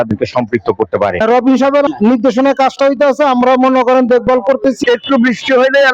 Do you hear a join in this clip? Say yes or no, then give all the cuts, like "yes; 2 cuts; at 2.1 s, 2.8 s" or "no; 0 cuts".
yes; 2 cuts; at 1.2 s, 4.8 s